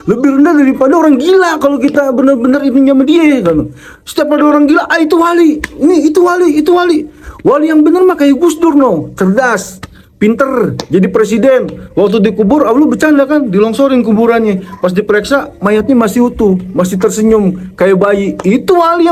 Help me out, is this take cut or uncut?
uncut